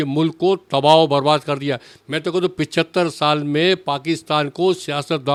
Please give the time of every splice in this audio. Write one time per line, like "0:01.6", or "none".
none